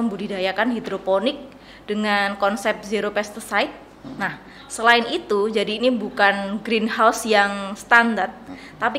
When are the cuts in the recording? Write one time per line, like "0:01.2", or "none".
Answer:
none